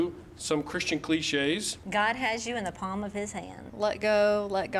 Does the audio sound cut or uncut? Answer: cut